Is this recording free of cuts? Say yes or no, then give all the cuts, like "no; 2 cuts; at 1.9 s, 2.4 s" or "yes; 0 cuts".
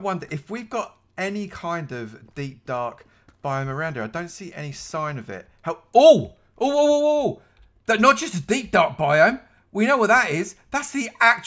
yes; 0 cuts